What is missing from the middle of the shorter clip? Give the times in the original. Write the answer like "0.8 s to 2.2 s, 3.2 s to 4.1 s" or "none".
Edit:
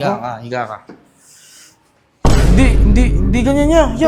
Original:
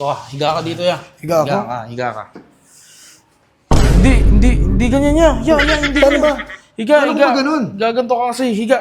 none